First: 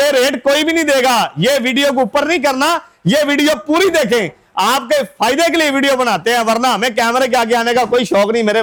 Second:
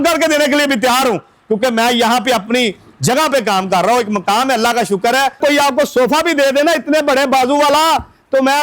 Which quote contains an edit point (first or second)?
second